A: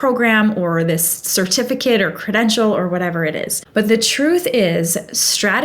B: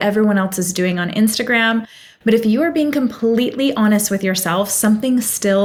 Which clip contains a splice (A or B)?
A